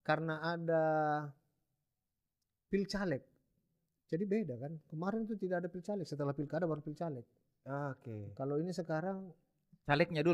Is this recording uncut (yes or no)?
yes